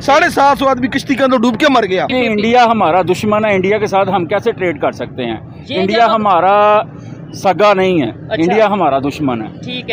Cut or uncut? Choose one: cut